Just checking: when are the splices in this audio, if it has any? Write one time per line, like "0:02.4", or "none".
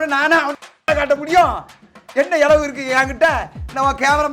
none

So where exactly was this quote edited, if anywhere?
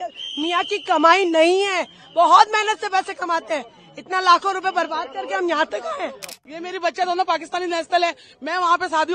0:06.4

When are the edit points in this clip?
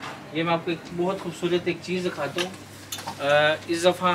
none

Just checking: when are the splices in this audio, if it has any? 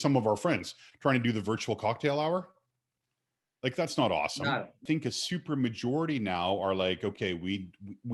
0:04.8

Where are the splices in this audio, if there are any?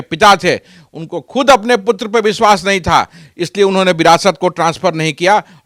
none

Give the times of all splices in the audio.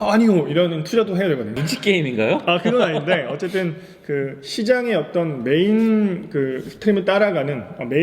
none

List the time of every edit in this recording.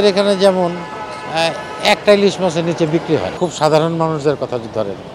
0:03.3

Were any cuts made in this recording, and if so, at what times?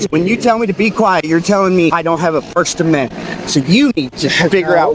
0:02.0

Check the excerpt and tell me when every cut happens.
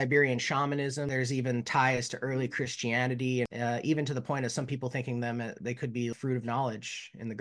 0:01.1
0:03.5
0:06.1

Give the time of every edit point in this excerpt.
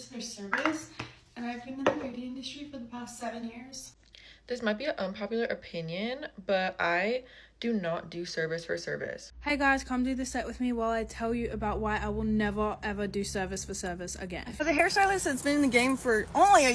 0:04.1
0:09.3
0:14.5

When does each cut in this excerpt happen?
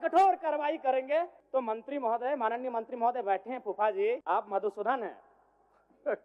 0:01.4
0:04.2

